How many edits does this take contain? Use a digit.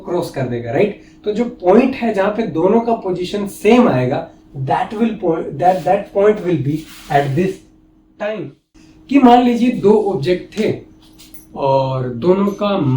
1